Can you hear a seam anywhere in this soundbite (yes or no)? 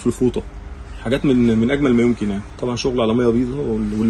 yes